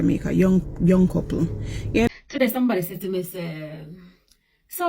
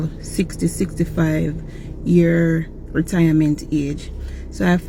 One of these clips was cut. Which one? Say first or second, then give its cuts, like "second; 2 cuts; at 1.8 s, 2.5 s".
first; 1 cut; at 2.1 s